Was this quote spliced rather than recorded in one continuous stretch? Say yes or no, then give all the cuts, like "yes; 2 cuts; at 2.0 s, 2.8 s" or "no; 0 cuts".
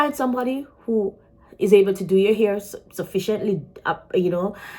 no; 0 cuts